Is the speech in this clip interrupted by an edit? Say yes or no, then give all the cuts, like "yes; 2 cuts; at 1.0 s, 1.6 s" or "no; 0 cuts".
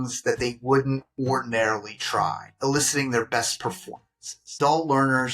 yes; 2 cuts; at 2.5 s, 4.5 s